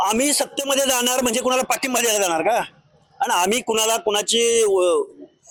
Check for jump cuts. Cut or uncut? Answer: uncut